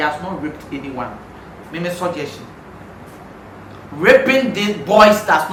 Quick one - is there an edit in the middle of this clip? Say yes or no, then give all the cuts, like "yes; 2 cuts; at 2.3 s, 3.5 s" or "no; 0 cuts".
no; 0 cuts